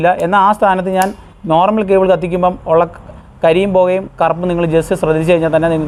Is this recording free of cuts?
yes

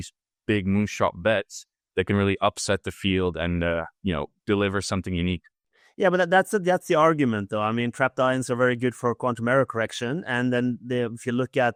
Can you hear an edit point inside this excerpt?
no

